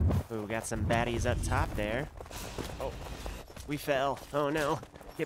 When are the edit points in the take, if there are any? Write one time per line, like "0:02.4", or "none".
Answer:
none